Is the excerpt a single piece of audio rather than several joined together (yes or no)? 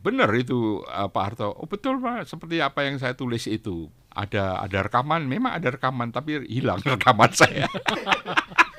no